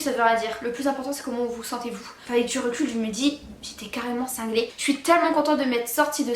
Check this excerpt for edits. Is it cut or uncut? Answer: cut